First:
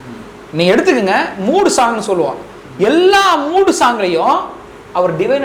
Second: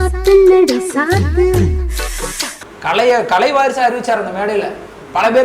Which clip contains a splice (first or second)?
second